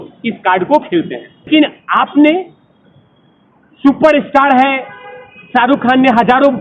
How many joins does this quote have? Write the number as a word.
one